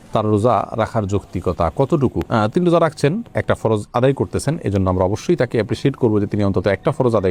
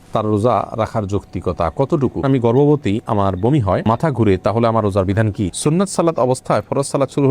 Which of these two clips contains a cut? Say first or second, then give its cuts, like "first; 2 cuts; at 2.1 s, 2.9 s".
second; 2 cuts; at 2.2 s, 5.5 s